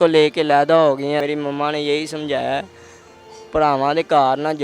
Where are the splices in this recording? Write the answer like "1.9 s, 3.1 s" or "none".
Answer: 1.2 s